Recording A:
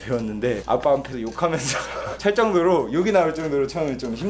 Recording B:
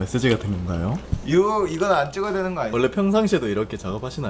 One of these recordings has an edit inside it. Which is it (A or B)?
B